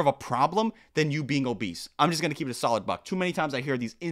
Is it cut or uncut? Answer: uncut